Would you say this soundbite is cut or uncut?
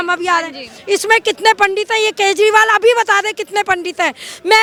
uncut